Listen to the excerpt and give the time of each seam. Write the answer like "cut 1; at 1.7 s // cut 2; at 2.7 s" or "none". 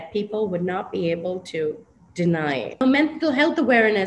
cut 1; at 2.8 s